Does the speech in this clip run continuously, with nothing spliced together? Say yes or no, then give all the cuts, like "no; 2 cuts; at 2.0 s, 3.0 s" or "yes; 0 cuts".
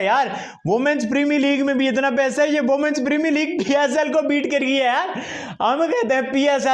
yes; 0 cuts